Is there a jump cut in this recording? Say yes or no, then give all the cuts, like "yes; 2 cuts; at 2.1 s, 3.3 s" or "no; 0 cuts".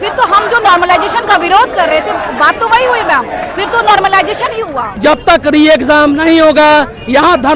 yes; 1 cut; at 5.0 s